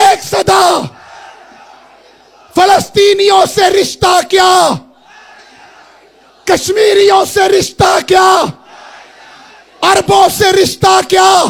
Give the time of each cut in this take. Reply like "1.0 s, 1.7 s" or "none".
none